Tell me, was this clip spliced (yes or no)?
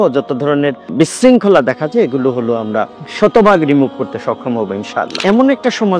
yes